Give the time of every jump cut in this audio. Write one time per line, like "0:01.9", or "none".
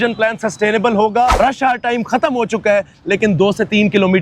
0:01.3